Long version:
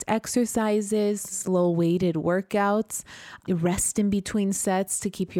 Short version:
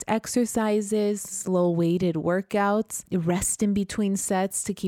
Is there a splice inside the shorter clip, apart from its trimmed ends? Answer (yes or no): yes